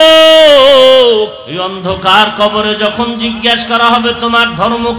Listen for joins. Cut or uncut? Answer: cut